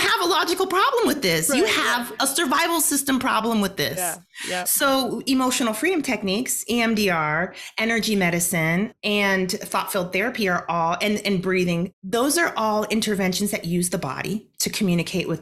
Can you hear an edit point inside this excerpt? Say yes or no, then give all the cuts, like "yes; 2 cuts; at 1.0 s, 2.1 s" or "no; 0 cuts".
no; 0 cuts